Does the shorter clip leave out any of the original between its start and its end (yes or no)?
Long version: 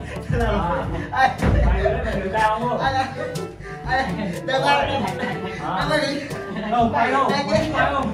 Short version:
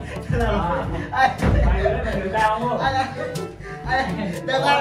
no